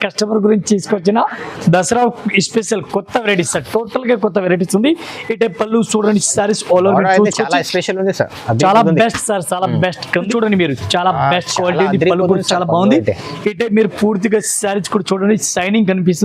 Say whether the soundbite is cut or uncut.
cut